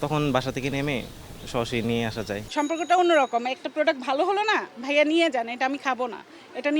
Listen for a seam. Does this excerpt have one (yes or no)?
yes